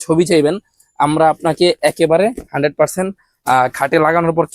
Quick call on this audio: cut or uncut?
uncut